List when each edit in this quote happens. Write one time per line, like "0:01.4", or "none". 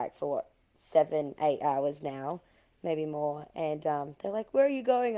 none